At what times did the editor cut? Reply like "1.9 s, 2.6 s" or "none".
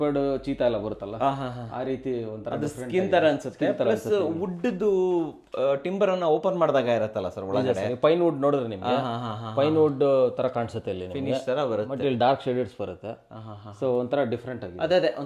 none